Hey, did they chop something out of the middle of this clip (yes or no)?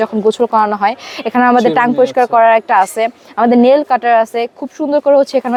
no